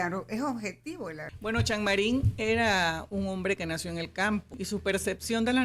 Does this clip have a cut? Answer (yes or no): yes